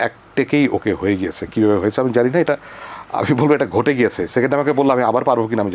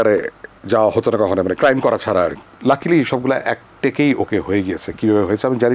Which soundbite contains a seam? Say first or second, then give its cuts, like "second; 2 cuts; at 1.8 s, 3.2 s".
second; 1 cut; at 2.5 s